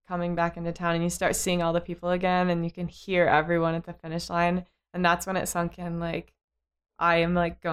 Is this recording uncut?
yes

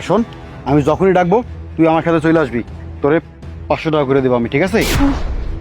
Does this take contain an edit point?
no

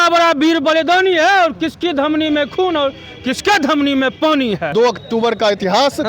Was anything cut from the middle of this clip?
yes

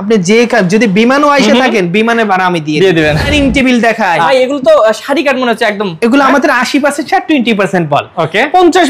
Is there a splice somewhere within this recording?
yes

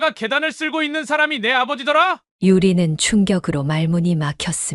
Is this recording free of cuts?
yes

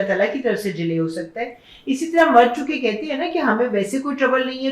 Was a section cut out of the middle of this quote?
no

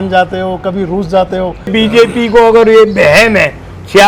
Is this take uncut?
no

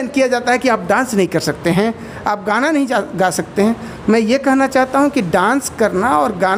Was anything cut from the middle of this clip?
no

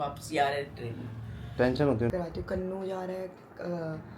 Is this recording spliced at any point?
yes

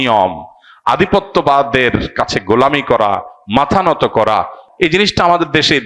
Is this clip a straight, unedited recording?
no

